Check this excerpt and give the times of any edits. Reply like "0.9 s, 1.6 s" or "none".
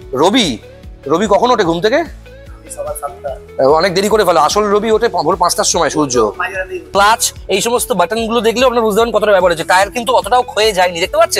6.9 s

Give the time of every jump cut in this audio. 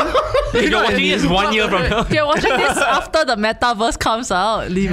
2.1 s

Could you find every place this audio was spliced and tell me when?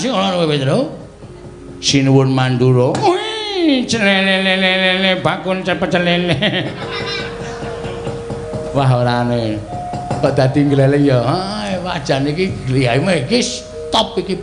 8.3 s

